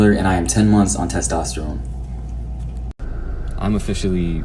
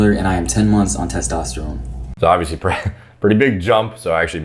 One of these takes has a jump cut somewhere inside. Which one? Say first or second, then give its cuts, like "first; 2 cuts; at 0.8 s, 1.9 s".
first; 1 cut; at 2.1 s